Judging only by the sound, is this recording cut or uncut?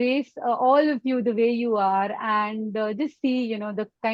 uncut